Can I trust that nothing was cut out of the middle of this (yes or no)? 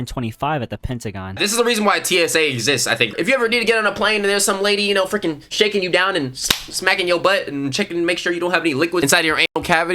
no